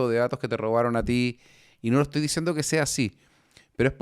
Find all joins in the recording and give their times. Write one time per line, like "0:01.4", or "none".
none